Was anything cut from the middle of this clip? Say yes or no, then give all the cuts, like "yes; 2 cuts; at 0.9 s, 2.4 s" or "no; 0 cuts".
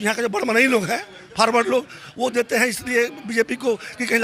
no; 0 cuts